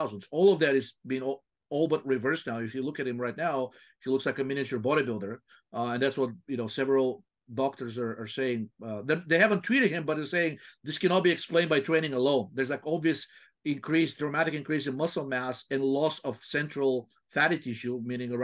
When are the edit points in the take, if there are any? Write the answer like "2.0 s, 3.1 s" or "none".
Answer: none